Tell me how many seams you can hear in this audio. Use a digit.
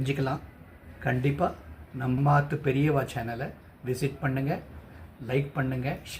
1